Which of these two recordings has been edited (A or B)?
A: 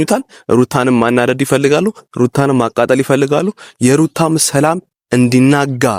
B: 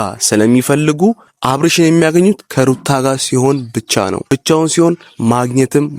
B